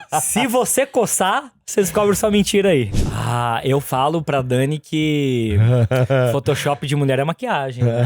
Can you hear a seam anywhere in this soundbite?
yes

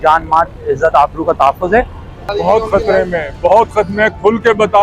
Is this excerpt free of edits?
no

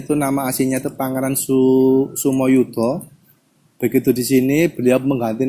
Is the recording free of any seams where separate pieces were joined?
yes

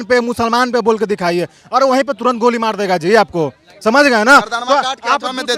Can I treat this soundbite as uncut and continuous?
yes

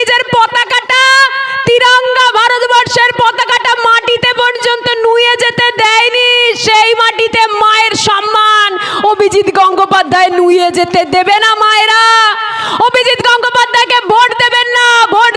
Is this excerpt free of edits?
yes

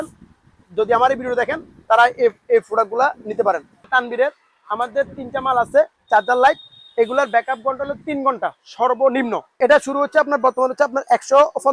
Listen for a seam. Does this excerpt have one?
yes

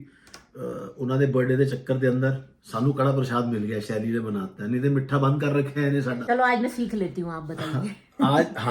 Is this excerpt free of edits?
no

